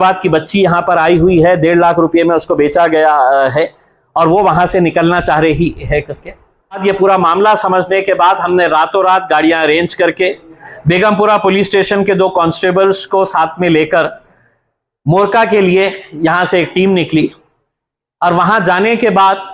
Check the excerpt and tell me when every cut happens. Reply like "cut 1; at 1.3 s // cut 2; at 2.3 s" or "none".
cut 1; at 6.8 s